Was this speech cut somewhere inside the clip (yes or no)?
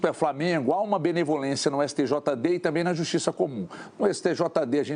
no